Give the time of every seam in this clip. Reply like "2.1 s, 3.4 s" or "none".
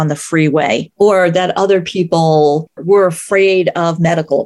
0.9 s, 2.8 s